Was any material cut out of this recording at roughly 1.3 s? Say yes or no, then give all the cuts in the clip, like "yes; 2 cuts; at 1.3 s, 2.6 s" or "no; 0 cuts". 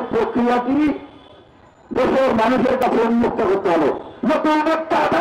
no; 1 cut; at 4.1 s